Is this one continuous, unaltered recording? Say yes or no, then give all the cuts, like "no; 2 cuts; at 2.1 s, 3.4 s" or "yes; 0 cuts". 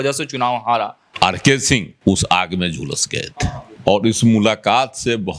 no; 3 cuts; at 1.0 s, 1.9 s, 3.7 s